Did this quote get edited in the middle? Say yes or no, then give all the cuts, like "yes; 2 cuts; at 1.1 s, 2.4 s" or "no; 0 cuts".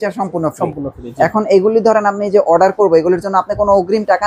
no; 0 cuts